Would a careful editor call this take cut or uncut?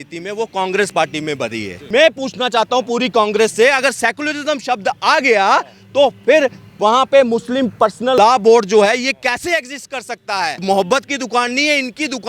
cut